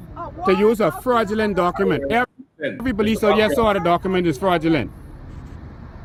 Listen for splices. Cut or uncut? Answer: uncut